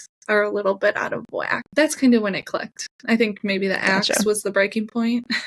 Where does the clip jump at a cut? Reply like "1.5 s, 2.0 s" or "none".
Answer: 1.6 s